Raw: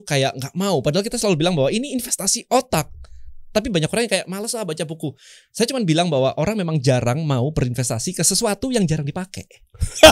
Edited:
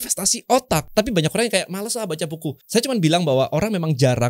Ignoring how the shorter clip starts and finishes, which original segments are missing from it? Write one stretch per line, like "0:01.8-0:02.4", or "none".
0:02.9-0:03.4
0:05.2-0:05.5